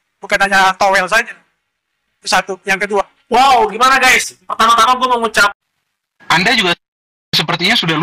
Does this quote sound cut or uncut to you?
cut